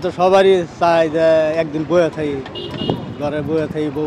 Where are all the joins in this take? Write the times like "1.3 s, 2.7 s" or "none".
none